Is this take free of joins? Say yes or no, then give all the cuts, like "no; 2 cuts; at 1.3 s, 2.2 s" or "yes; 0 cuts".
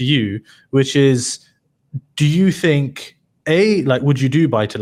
yes; 0 cuts